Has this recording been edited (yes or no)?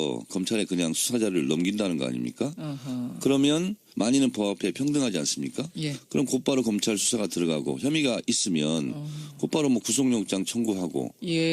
no